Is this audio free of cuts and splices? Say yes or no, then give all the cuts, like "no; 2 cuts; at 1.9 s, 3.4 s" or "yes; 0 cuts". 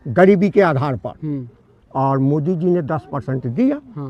yes; 0 cuts